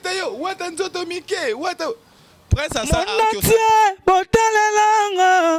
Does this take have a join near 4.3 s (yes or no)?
no